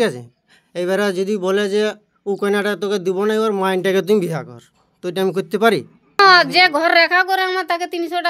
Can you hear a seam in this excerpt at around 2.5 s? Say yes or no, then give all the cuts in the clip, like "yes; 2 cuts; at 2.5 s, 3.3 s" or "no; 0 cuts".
no; 1 cut; at 6.2 s